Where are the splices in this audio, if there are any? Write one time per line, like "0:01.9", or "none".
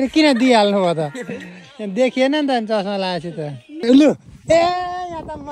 0:03.8